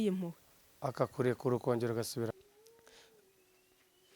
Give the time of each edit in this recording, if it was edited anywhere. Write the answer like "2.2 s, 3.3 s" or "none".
2.3 s